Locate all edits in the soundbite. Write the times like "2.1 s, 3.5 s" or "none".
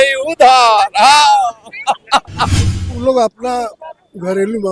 2.6 s